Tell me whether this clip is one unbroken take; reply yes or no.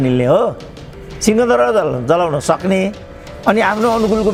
yes